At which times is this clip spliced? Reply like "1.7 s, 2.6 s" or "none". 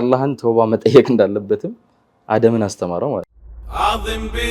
3.3 s